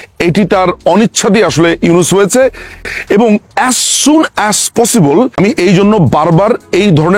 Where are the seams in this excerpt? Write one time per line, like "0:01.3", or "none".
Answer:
0:02.9
0:05.3